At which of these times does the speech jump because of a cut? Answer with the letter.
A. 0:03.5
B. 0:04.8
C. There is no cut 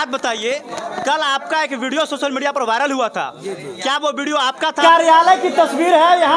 B